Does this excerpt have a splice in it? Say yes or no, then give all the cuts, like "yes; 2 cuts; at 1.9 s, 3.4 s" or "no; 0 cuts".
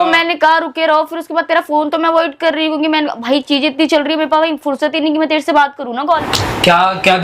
yes; 1 cut; at 6.2 s